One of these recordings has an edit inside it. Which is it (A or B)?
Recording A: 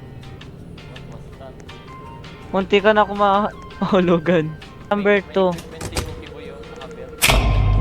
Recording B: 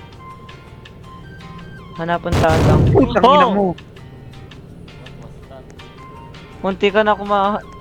A